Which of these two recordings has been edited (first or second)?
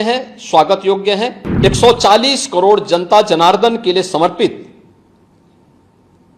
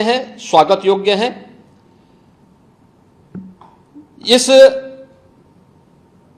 first